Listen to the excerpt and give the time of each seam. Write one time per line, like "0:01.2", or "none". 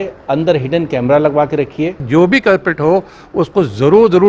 0:02.0